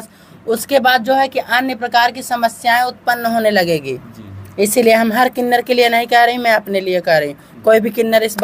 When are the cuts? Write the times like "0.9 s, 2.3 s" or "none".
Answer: none